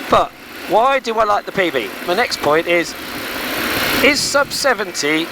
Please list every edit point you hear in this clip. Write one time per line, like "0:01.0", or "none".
0:01.9